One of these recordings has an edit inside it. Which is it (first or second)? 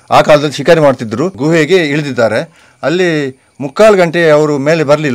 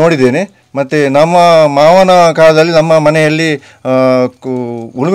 first